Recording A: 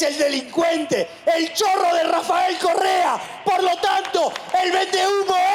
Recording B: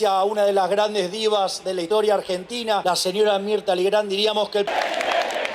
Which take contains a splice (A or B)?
B